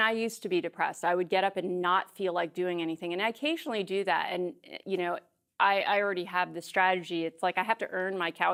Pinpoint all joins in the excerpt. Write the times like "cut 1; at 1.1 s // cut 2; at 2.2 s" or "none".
none